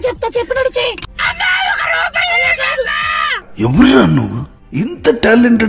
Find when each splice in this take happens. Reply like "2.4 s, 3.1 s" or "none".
1.1 s